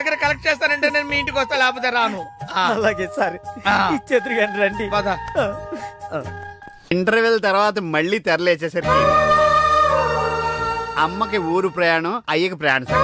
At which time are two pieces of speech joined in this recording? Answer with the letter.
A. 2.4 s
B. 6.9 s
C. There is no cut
B